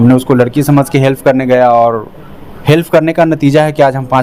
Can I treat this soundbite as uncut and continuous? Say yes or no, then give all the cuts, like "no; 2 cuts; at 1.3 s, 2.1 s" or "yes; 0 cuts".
yes; 0 cuts